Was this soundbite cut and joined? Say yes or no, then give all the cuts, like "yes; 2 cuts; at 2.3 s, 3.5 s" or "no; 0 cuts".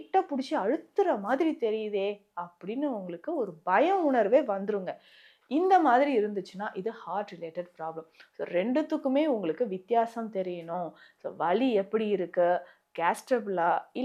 no; 0 cuts